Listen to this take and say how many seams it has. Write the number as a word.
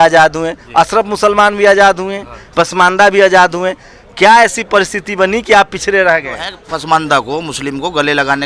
one